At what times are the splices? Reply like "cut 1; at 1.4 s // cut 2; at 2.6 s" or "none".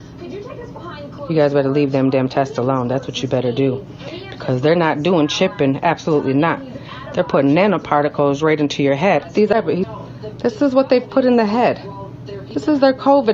cut 1; at 9.5 s